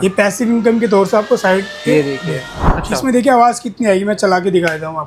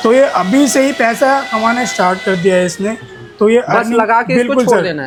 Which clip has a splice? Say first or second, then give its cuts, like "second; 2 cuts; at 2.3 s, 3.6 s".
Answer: first; 1 cut; at 2.7 s